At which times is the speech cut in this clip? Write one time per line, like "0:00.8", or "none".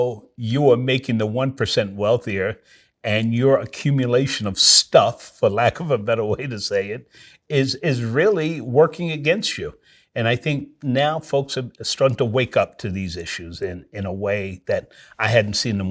none

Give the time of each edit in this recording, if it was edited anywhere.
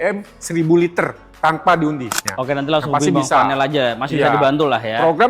0:02.2

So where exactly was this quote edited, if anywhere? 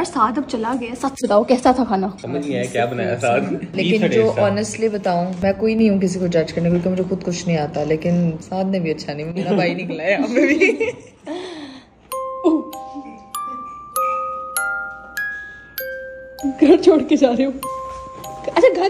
0:02.2
0:03.7
0:16.4

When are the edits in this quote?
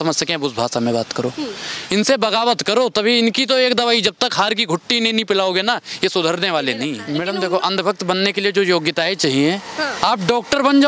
0:07.0

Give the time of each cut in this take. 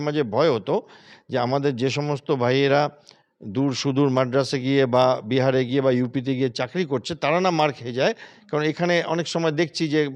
none

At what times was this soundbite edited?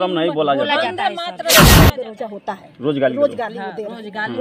0:01.4
0:01.9

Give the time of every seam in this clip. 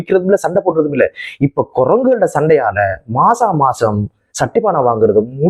none

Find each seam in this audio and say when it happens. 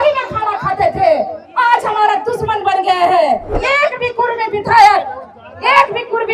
0:03.6

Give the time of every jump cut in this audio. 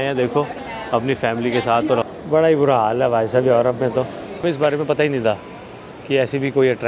0:02.1
0:04.2

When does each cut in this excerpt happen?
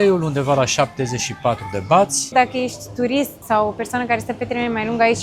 0:02.3
0:03.4

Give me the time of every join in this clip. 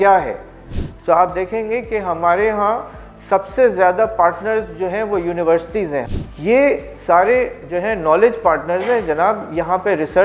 0:06.1

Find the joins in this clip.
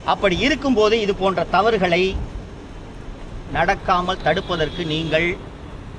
none

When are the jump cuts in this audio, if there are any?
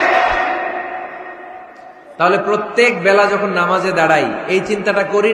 none

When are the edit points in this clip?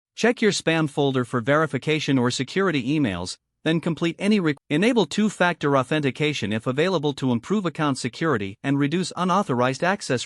0:04.6

